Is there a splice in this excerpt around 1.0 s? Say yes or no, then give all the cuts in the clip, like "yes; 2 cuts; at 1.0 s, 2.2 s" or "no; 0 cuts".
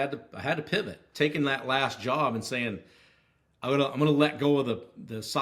yes; 1 cut; at 1.0 s